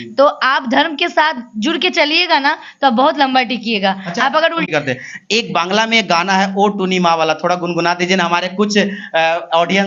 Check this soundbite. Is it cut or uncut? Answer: uncut